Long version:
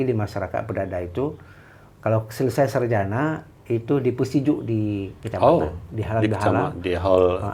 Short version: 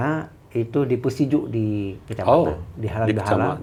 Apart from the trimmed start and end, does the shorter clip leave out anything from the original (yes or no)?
no